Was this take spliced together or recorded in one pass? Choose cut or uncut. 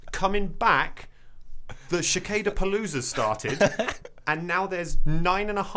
uncut